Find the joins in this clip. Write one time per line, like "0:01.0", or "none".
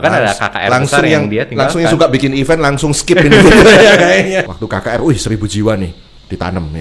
0:04.5